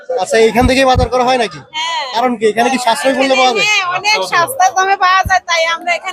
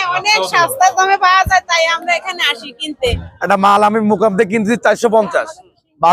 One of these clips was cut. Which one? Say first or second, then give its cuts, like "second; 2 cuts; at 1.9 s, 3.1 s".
second; 1 cut; at 3.3 s